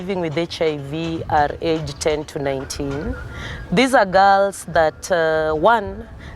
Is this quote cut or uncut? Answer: uncut